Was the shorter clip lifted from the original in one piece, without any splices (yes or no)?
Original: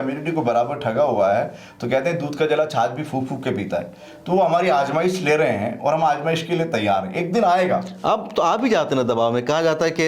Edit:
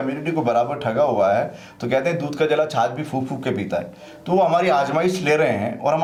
yes